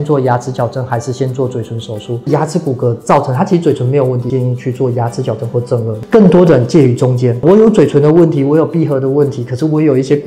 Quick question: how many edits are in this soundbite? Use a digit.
4